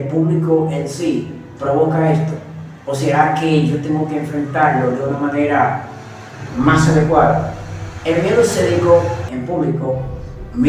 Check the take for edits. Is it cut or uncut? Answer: cut